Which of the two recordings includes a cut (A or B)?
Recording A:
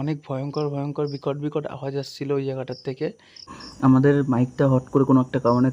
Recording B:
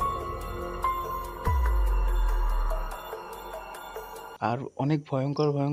A